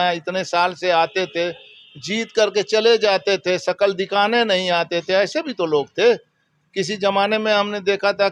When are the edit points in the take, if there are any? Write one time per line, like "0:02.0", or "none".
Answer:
none